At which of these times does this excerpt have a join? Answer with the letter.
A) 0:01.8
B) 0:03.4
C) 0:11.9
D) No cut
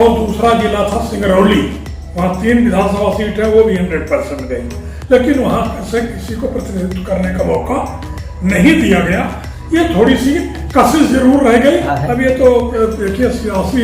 C